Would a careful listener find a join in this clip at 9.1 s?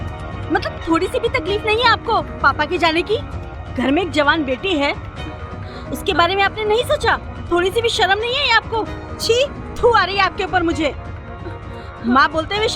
yes; 2 cuts; at 7.3 s, 9.1 s

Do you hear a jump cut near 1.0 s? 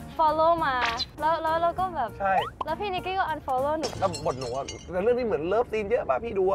yes; 2 cuts; at 1.0 s, 3.9 s

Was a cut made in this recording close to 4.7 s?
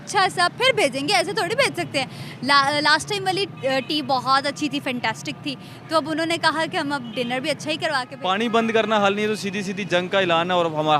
no; 1 cut; at 8.1 s

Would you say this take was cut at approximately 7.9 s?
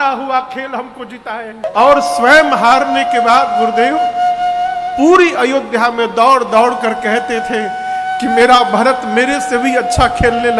no; 1 cut; at 1.6 s

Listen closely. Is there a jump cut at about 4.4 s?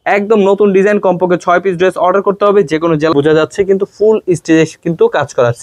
no; 1 cut; at 3.1 s

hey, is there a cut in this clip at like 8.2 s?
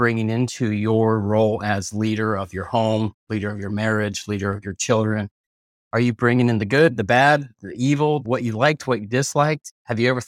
yes; 1 cut; at 8.2 s

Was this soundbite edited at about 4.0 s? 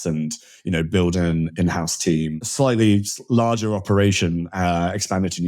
no; 1 cut; at 2.4 s

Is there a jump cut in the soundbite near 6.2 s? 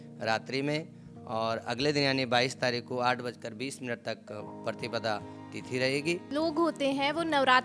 yes; 1 cut; at 6.2 s

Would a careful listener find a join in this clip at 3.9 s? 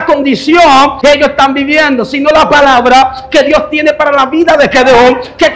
no; 1 cut; at 1.0 s

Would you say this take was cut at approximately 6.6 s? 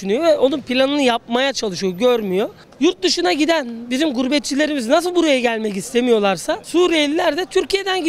yes; 2 cuts; at 2.6 s, 6.6 s

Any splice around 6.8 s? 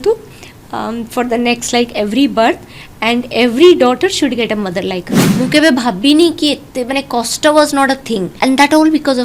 no; 2 cuts; at 5.2 s, 8.3 s

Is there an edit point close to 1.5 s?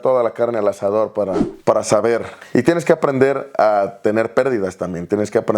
yes; 1 cut; at 1.5 s

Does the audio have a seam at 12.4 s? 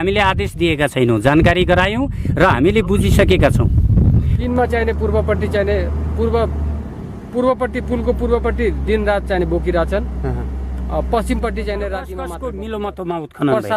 yes; 2 cuts; at 4.3 s, 12.4 s

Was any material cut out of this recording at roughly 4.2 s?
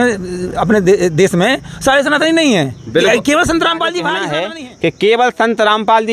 yes; 1 cut; at 4.2 s

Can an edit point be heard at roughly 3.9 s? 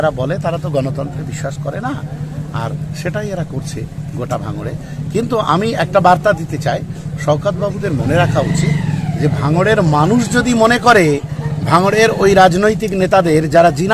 no; 0 cuts

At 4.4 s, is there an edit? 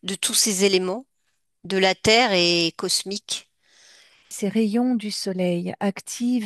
yes; 1 cut; at 4.4 s

